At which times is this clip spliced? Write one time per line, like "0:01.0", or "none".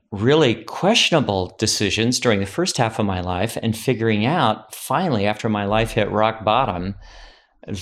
none